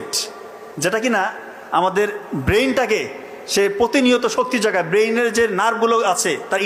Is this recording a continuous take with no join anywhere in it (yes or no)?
yes